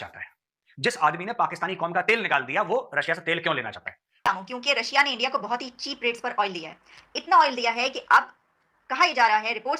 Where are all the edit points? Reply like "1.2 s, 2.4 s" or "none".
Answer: 4.3 s